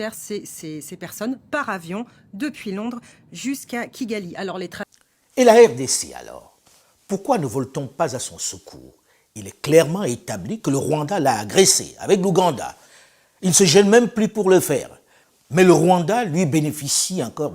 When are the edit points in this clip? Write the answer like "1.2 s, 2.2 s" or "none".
4.8 s